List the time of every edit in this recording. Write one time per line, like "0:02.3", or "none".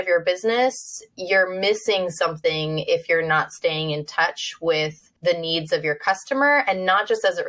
0:05.0